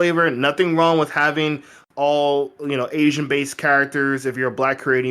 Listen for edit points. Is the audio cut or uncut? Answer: uncut